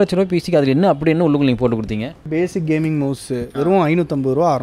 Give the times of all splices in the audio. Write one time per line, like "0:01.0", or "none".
0:02.3